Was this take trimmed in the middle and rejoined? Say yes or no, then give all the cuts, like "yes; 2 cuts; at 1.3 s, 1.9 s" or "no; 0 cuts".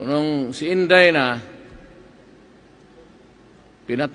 no; 0 cuts